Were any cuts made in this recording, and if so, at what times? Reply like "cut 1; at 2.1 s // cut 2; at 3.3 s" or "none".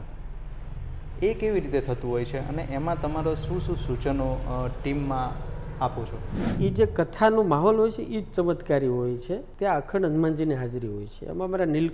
cut 1; at 6.5 s // cut 2; at 9.5 s